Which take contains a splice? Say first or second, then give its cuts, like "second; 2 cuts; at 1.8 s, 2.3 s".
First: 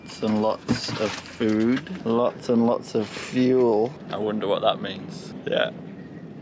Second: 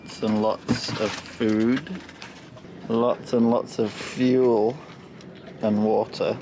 first; 3 cuts; at 1.9 s, 4.0 s, 5.3 s